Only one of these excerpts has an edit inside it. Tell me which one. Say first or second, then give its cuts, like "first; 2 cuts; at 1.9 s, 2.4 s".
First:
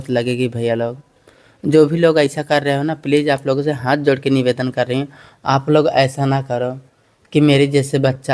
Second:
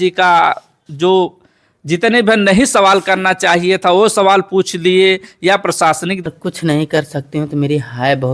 second; 1 cut; at 6.2 s